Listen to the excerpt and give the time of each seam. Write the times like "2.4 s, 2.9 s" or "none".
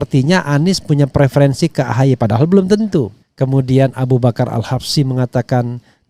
3.2 s